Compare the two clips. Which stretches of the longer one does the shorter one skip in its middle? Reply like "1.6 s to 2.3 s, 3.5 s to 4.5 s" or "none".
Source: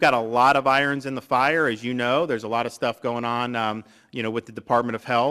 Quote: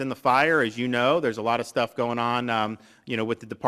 none